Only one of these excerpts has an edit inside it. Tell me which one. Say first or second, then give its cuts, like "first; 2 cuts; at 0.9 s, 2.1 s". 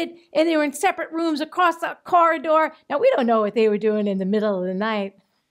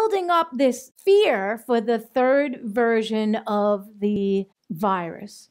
second; 1 cut; at 4.2 s